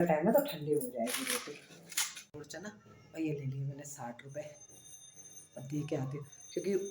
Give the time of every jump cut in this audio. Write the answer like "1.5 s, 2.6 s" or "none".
2.5 s